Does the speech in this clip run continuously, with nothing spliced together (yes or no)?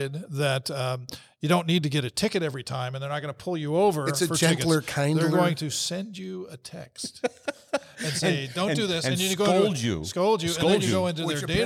yes